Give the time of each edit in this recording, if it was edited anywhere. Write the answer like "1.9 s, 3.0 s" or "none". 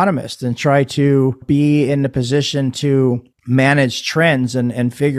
1.4 s, 3.3 s

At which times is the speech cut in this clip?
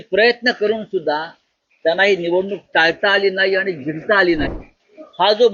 4.5 s

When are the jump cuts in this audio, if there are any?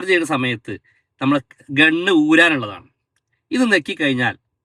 none

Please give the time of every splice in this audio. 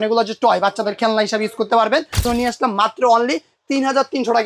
2.2 s

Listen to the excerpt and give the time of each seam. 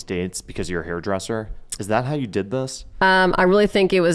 none

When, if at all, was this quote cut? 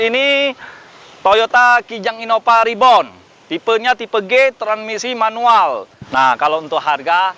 6.0 s

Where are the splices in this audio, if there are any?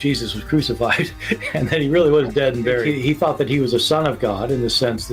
1.4 s

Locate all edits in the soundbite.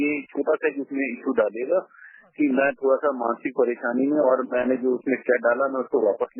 none

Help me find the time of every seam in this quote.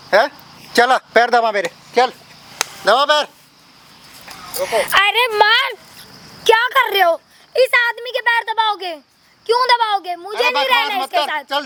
none

